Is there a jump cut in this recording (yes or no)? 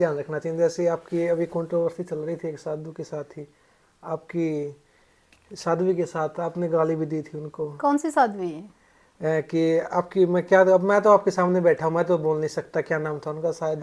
no